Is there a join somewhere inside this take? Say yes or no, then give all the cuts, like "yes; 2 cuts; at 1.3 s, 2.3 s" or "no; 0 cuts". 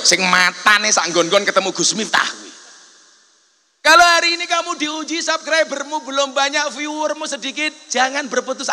no; 0 cuts